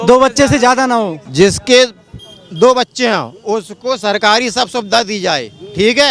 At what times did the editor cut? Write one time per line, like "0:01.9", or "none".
0:01.2